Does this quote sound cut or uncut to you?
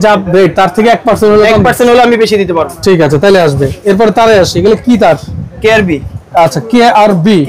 uncut